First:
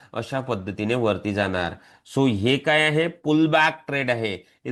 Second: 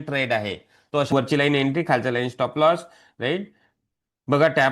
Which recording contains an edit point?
second; 1 cut; at 1.1 s

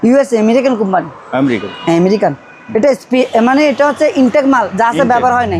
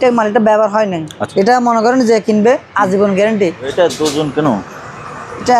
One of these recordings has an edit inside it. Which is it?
second; 2 cuts; at 1.2 s, 3.7 s

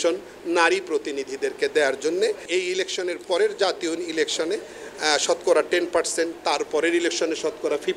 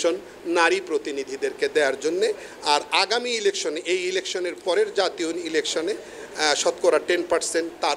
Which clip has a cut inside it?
first; 1 cut; at 2.4 s

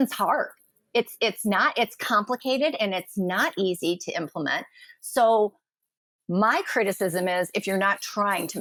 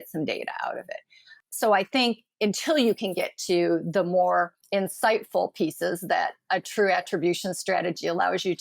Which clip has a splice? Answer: second; 2 cuts; at 1.4 s, 4.6 s

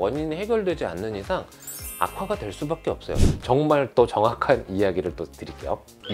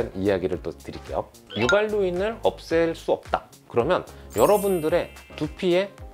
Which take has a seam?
first; 1 cut; at 3.2 s

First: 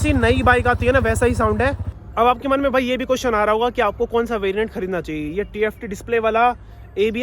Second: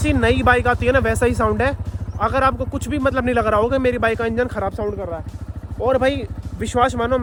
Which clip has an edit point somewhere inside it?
first; 1 cut; at 2.0 s

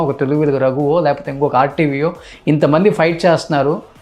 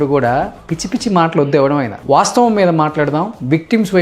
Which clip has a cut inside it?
second; 1 cut; at 1.9 s

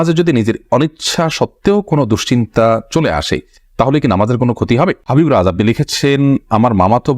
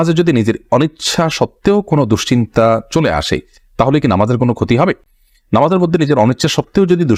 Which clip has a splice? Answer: first; 1 cut; at 5.0 s

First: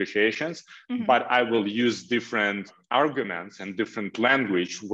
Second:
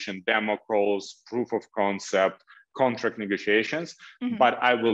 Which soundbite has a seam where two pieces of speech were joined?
first; 1 cut; at 2.8 s

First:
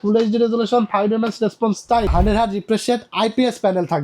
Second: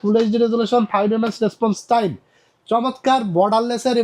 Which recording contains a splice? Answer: first; 1 cut; at 2.1 s

